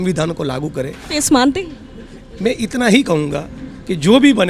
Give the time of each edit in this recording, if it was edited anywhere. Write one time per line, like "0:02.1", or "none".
0:01.0